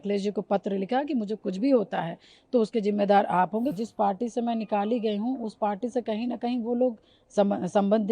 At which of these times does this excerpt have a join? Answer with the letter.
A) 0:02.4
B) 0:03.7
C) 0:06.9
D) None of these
B